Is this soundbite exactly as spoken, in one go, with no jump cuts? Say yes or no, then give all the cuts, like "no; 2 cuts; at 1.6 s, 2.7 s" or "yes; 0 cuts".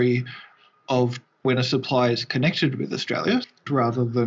no; 2 cuts; at 1.5 s, 3.6 s